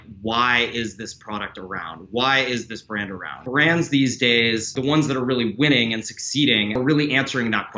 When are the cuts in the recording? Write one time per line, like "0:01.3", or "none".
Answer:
0:03.3
0:04.8
0:06.8